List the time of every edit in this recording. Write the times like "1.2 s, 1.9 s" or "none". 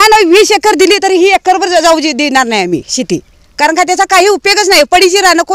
none